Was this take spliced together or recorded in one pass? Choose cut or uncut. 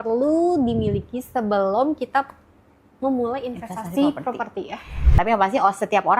cut